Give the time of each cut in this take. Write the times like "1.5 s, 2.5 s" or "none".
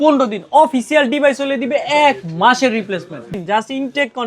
3.3 s